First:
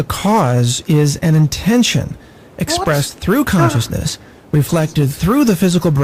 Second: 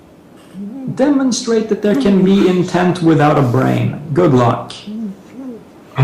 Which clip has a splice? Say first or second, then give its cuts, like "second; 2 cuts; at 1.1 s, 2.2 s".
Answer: second; 1 cut; at 4.0 s